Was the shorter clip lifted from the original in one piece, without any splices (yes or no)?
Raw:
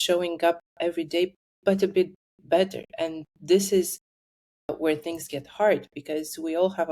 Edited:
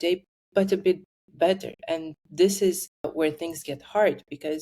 no